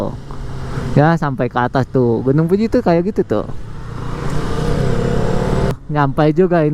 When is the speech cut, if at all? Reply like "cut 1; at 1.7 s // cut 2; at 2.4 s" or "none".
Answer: cut 1; at 5.7 s